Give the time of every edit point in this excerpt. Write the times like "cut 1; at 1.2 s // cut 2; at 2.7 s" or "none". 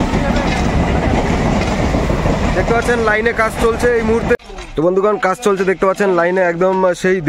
cut 1; at 4.4 s